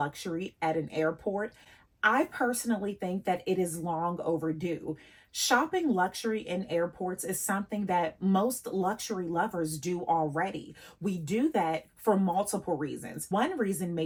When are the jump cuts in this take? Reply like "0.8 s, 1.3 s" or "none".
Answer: none